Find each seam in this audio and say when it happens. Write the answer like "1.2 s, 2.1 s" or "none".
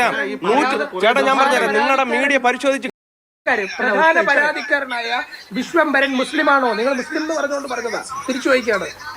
3.4 s